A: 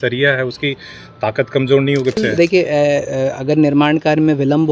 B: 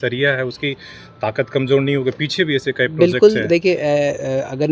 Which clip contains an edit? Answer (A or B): A